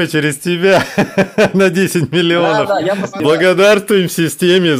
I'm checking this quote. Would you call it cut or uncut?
cut